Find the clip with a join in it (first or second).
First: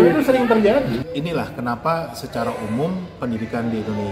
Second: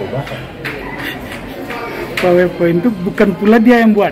first